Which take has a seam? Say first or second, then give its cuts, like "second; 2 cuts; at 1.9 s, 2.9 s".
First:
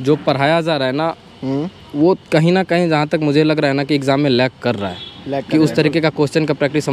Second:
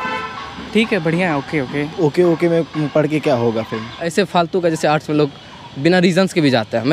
second; 2 cuts; at 1.9 s, 4.0 s